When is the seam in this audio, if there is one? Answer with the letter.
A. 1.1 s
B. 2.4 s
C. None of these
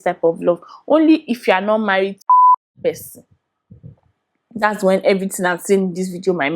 C